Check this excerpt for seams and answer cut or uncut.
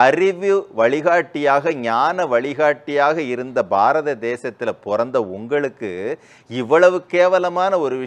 uncut